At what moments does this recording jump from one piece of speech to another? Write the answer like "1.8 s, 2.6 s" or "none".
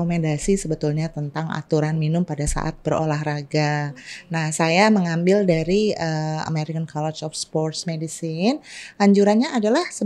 none